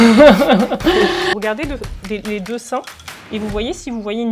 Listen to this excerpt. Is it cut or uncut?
cut